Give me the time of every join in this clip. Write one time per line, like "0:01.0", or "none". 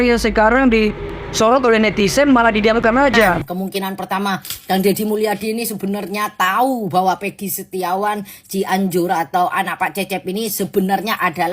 0:03.5

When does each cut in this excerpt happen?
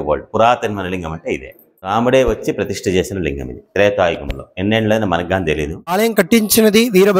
0:01.9
0:05.9

